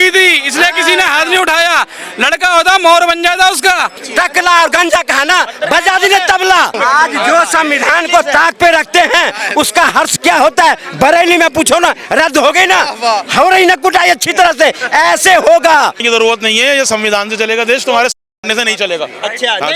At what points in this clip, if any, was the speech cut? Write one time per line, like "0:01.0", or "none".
0:04.0
0:06.8
0:16.0

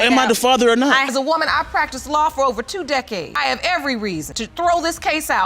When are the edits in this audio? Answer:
0:01.0
0:03.3
0:04.4

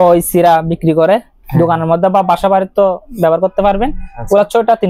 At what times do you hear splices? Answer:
none

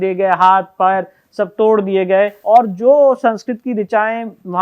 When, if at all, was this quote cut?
0:02.4

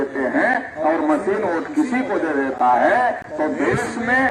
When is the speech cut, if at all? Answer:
none

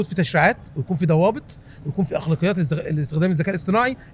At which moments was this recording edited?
none

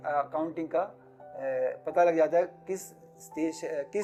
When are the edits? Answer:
none

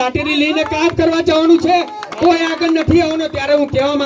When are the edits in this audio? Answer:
none

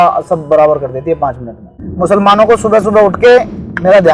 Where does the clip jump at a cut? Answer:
0:01.8

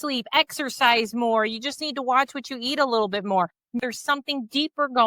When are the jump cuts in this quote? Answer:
0:03.8

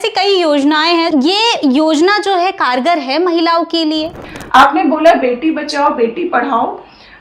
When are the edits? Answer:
0:01.1
0:04.2

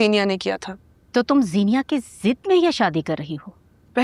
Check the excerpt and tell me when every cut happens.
none

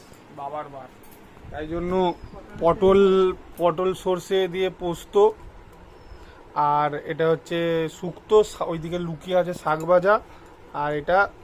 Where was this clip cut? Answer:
none

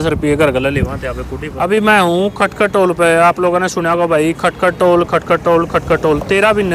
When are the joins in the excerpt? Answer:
0:01.5

